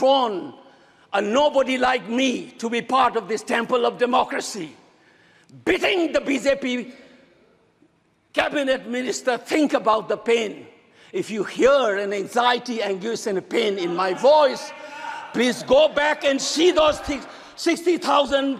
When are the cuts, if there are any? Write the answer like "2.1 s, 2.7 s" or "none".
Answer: none